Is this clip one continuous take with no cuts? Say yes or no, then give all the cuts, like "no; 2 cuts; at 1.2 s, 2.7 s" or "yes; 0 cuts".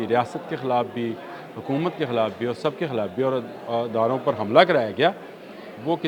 yes; 0 cuts